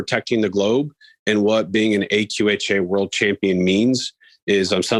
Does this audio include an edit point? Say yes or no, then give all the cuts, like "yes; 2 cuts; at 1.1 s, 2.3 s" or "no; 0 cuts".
no; 0 cuts